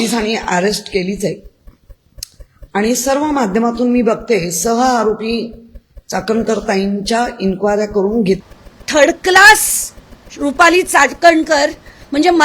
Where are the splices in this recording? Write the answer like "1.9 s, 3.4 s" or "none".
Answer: 8.4 s

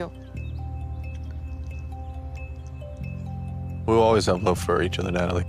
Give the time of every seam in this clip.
none

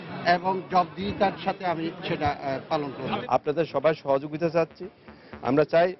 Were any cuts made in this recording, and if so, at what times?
3.2 s

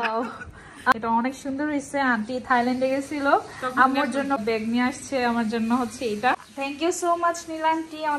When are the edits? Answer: 0.9 s, 4.4 s, 6.5 s

